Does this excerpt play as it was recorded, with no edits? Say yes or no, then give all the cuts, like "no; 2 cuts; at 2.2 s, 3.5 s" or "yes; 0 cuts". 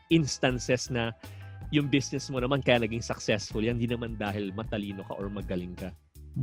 yes; 0 cuts